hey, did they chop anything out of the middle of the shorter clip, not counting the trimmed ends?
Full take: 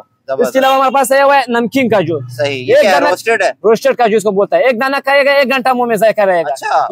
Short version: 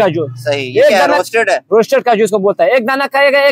no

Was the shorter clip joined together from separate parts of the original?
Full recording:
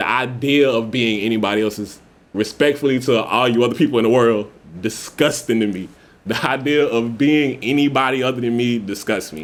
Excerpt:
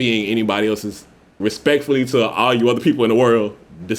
no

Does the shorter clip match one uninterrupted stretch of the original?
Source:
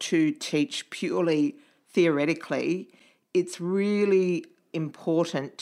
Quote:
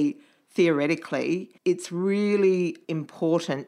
no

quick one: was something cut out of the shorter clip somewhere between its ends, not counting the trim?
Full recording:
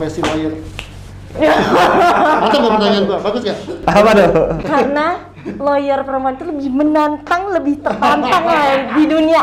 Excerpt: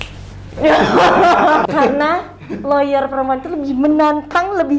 yes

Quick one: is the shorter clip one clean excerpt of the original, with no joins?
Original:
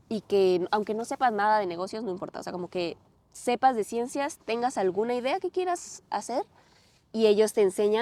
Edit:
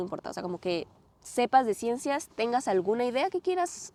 yes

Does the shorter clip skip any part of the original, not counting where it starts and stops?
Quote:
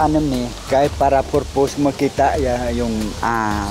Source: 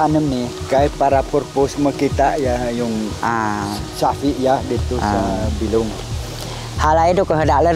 no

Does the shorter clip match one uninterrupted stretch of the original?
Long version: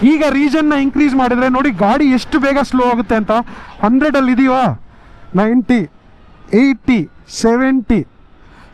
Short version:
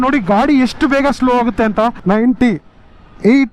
no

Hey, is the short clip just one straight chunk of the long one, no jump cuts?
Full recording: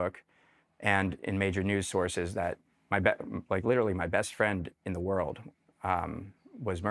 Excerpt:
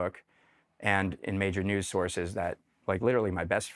no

